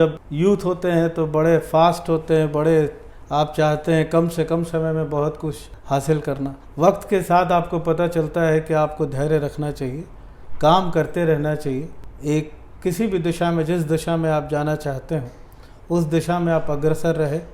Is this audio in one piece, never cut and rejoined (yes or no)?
yes